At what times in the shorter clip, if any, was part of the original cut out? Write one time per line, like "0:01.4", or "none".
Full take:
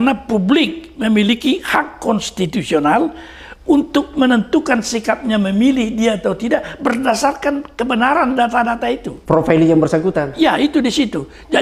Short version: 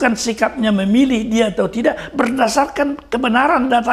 none